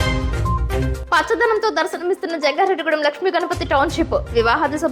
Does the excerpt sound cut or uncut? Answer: cut